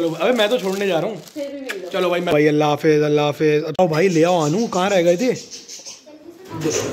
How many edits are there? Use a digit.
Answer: 2